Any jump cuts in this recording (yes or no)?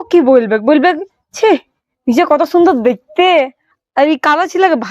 yes